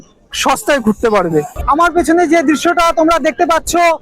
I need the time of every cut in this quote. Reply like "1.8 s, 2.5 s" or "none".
1.6 s